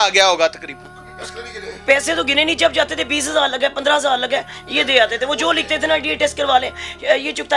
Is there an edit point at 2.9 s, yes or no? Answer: no